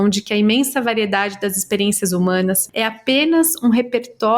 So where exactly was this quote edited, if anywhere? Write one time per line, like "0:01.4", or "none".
0:02.6